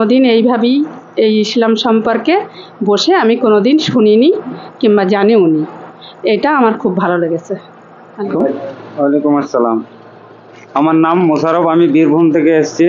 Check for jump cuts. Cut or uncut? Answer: cut